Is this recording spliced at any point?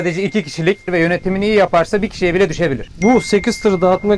yes; 2 cuts; at 0.9 s, 2.9 s

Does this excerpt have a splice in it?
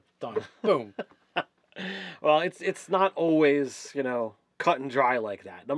yes; 1 cut; at 3.4 s

